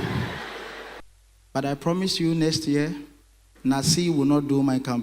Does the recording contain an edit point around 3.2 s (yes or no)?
no